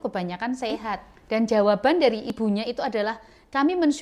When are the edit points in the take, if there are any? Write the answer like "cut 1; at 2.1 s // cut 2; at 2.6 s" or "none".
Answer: cut 1; at 1.1 s // cut 2; at 2.3 s